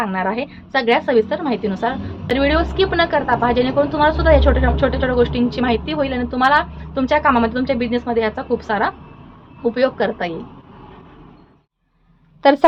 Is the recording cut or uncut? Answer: uncut